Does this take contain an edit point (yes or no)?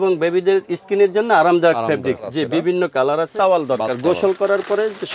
yes